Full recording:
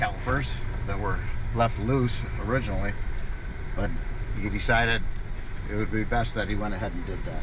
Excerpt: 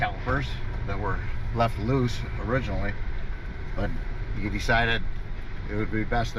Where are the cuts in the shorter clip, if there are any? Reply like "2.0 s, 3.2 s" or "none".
none